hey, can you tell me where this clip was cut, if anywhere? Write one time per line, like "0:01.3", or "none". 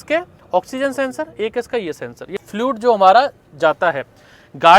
0:02.4